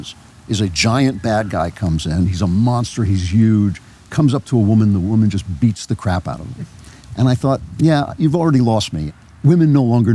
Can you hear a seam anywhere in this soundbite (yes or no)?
yes